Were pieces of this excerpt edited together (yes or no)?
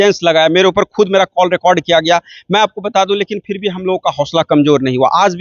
no